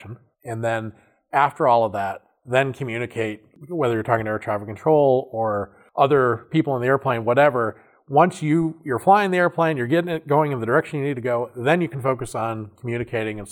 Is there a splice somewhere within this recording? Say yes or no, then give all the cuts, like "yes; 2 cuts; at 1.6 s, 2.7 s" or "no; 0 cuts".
no; 0 cuts